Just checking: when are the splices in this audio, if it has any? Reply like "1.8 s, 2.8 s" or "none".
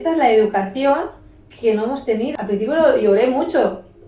2.3 s